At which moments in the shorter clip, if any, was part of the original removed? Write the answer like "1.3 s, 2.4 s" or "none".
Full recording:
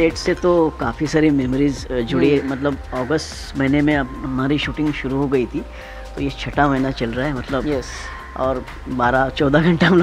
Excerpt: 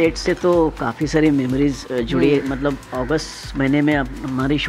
none